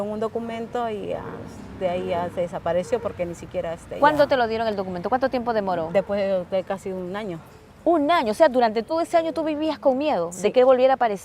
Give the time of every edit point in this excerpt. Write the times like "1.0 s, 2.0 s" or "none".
none